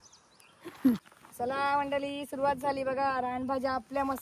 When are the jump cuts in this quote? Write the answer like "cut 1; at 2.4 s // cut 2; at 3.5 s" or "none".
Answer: cut 1; at 1.0 s